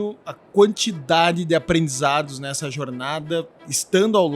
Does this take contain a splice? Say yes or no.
no